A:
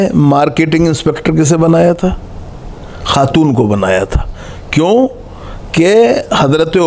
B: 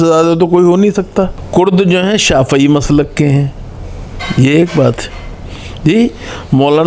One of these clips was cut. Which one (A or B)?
B